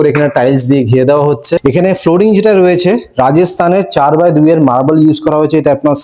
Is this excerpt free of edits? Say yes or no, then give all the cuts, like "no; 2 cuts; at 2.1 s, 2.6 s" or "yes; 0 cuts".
no; 1 cut; at 1.5 s